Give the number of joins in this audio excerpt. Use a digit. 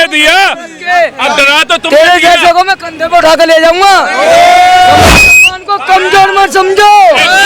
1